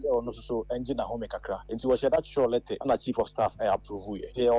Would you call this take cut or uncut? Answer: cut